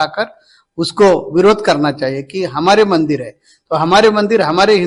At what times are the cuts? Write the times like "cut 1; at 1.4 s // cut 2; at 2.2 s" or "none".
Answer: none